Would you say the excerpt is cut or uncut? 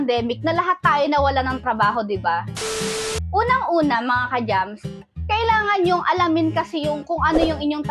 cut